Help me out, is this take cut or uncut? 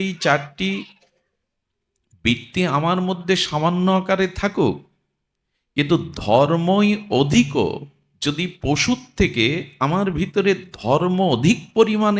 uncut